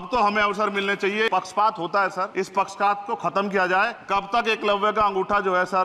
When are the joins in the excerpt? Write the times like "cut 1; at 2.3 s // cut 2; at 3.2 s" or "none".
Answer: cut 1; at 1.3 s // cut 2; at 2.3 s // cut 3; at 4.0 s